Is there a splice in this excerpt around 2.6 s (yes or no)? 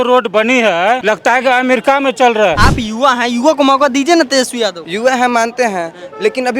yes